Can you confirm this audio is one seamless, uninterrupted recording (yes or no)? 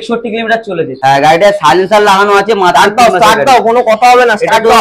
no